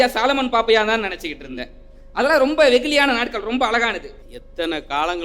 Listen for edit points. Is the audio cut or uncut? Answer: cut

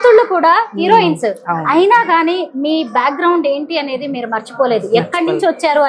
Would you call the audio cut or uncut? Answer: uncut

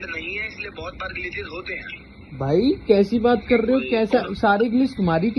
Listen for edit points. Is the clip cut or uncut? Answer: uncut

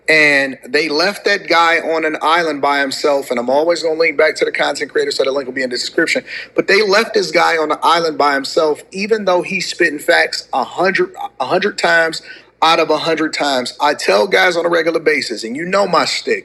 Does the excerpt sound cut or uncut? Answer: uncut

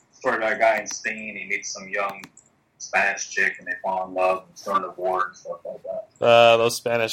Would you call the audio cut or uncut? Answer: uncut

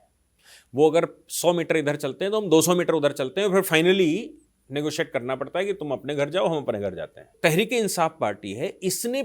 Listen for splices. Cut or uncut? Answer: cut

